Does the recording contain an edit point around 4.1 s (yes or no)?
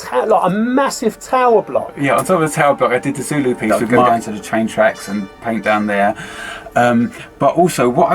yes